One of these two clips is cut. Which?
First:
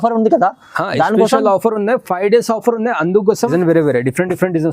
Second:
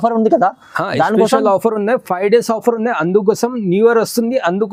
first; 1 cut; at 3.5 s

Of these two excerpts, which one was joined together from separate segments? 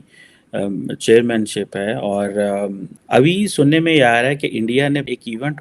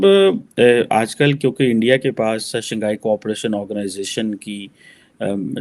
first; 1 cut; at 2.9 s

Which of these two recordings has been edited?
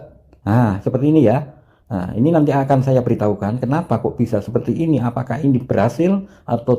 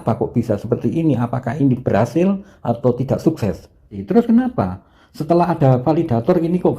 second; 1 cut; at 4.0 s

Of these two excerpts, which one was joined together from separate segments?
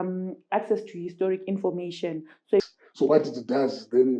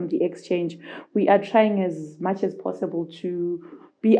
first; 1 cut; at 2.7 s

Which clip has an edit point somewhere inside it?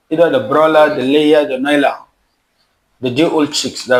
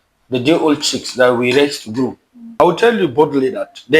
second; 1 cut; at 2.6 s

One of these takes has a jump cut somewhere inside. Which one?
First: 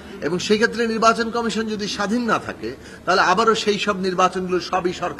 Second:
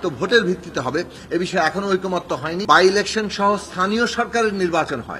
second; 1 cut; at 2.6 s

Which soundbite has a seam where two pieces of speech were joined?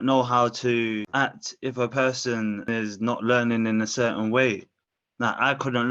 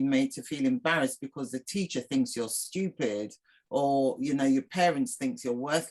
first; 2 cuts; at 1.1 s, 2.7 s

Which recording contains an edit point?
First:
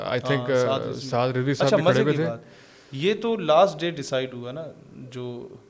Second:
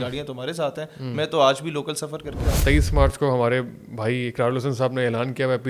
second; 1 cut; at 2.6 s

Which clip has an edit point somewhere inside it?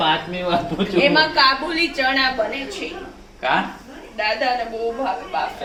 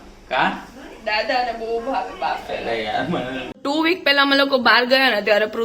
second; 1 cut; at 3.4 s

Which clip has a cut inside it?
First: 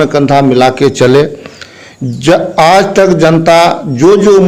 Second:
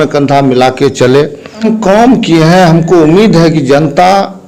second; 1 cut; at 1.6 s

